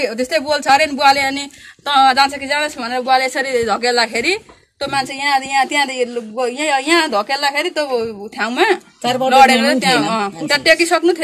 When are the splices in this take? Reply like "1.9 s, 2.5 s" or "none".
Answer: none